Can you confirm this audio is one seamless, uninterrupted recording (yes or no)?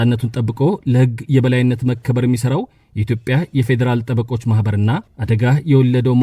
no